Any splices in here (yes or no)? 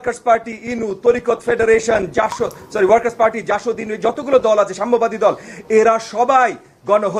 no